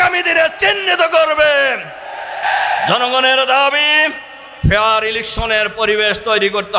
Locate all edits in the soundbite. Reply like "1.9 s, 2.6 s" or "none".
none